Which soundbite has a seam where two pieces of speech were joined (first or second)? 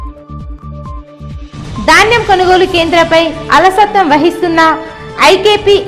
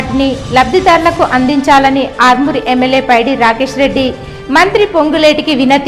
first